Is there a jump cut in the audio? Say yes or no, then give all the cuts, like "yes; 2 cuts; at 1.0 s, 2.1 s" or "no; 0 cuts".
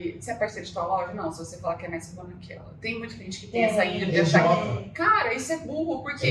no; 0 cuts